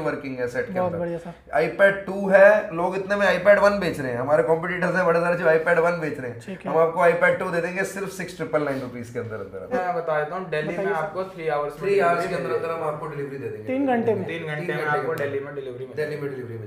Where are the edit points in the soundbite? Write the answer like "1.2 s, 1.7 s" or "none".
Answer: 9.7 s